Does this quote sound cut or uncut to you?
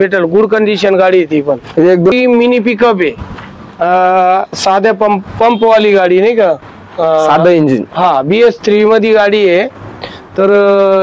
cut